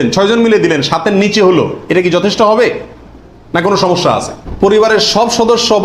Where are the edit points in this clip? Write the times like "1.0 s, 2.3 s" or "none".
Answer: 4.4 s